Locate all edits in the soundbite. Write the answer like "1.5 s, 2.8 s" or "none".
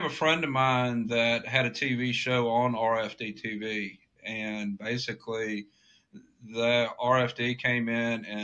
none